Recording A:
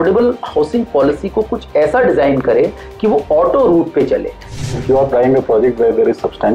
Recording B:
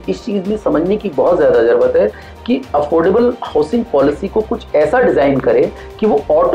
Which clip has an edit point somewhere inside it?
A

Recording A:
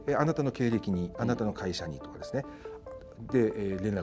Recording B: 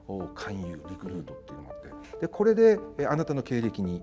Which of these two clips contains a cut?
B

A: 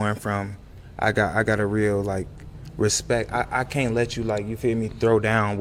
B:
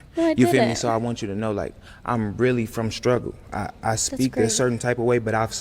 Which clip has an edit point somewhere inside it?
B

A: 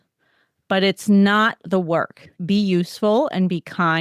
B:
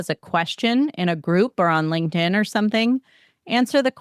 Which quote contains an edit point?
A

